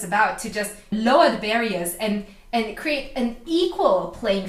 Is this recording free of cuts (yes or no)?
no